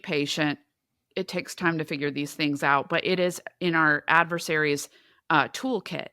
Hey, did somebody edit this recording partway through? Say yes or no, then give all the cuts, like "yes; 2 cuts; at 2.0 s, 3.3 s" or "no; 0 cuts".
no; 0 cuts